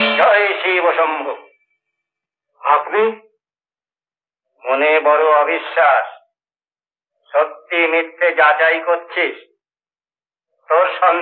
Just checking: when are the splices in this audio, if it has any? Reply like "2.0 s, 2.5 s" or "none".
none

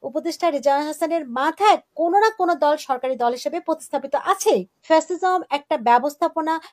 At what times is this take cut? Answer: 4.7 s

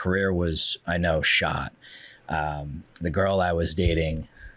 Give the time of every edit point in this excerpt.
none

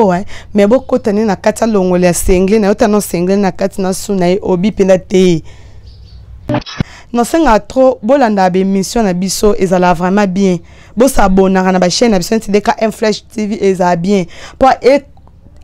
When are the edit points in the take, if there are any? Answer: 6.6 s

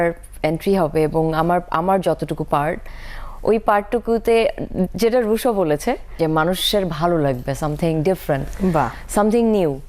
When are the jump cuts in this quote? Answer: none

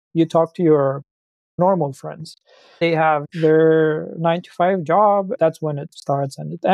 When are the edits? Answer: 1.6 s, 2.8 s, 5.4 s

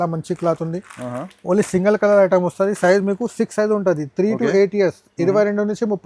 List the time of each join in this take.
none

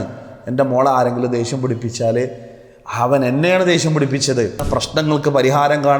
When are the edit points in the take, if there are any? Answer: 4.7 s

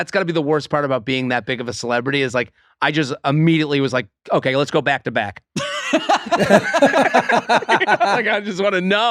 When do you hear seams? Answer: none

